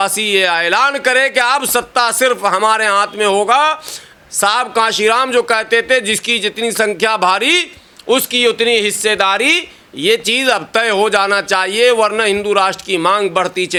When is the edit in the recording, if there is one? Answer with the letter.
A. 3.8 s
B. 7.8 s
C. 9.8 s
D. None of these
D